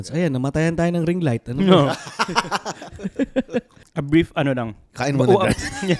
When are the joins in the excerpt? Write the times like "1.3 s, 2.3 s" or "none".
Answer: 3.8 s